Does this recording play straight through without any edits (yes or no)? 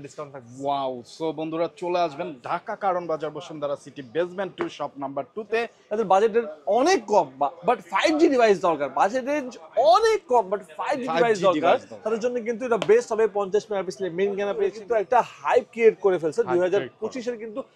no